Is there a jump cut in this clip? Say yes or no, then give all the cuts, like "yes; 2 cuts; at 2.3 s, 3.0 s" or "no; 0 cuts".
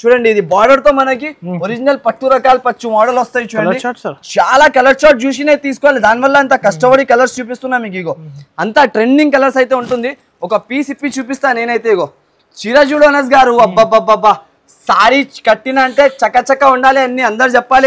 no; 0 cuts